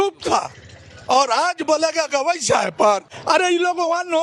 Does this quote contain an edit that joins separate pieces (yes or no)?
yes